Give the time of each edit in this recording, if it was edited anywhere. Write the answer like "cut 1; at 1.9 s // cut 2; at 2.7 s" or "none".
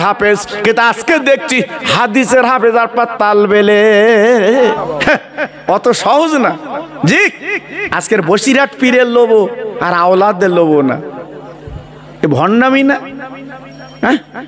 cut 1; at 4.7 s